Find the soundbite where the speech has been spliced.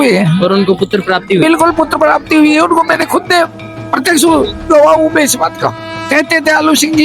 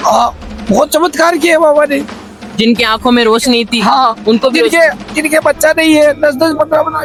first; 1 cut; at 5.9 s

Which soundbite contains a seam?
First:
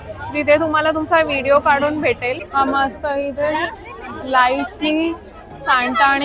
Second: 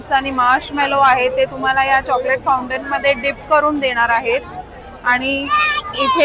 first; 1 cut; at 2.4 s

